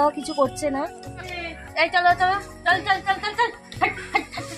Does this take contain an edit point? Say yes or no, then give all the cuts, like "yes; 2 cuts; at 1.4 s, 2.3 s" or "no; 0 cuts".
yes; 1 cut; at 1.3 s